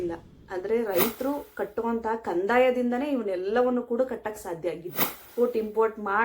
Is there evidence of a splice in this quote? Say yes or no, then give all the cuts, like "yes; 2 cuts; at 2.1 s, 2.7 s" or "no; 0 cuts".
yes; 1 cut; at 5.3 s